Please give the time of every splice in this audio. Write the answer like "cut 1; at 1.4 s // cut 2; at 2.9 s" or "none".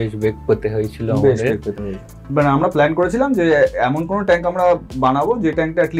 cut 1; at 2.2 s